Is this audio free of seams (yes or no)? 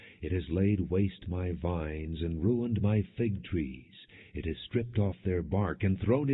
yes